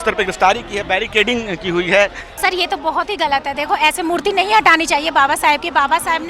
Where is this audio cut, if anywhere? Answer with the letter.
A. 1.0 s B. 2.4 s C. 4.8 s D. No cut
B